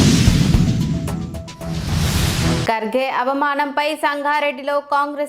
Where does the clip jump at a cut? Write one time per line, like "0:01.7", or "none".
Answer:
0:02.6